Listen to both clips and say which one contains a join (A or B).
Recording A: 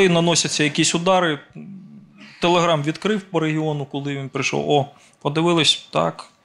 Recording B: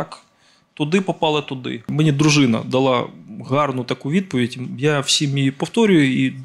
B